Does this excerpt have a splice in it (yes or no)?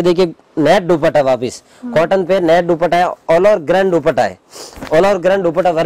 no